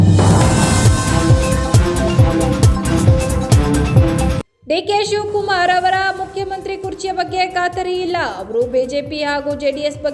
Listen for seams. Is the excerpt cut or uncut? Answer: cut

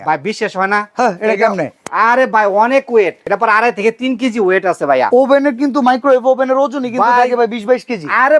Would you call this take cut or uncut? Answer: cut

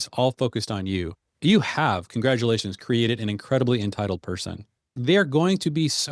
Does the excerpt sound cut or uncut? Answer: cut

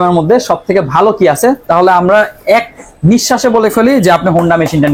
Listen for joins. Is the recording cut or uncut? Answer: uncut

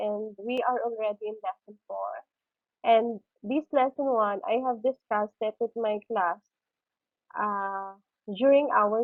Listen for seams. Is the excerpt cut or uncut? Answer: uncut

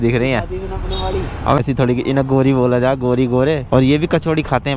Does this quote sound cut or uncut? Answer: cut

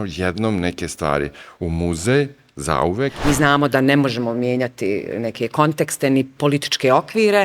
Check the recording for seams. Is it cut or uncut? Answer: cut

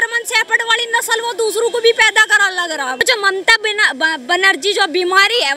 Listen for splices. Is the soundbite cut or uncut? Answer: cut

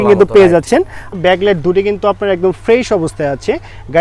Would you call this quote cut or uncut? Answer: cut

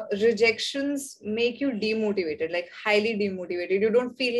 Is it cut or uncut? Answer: uncut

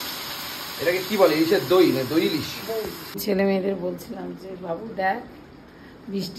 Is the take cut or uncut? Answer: cut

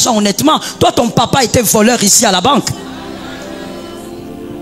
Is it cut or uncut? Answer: uncut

